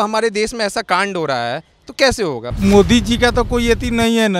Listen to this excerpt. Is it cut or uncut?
cut